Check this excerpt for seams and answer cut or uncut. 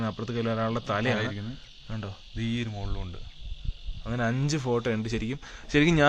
uncut